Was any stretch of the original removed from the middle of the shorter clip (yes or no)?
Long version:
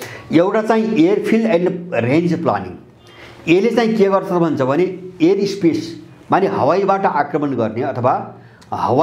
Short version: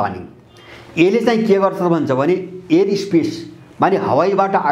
no